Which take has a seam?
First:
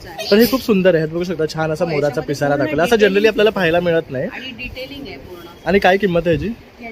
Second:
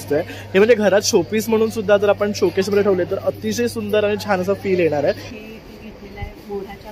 second; 1 cut; at 5.3 s

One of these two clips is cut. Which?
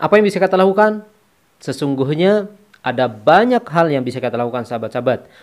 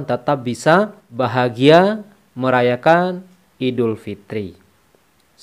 second; 1 cut; at 1.0 s

